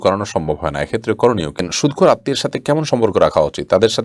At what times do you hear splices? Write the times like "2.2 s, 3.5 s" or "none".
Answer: 1.7 s